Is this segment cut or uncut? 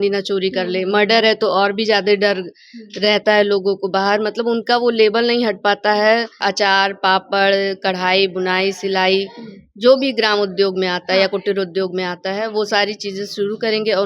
cut